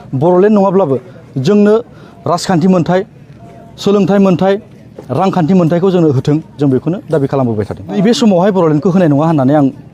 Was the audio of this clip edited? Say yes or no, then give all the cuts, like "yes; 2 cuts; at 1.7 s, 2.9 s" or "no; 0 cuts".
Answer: yes; 1 cut; at 8.0 s